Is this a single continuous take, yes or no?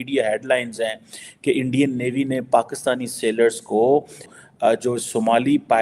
no